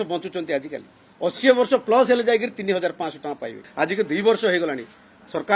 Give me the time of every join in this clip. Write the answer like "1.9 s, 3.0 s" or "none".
3.6 s